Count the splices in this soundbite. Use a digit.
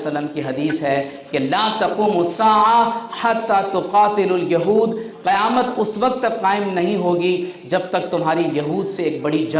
0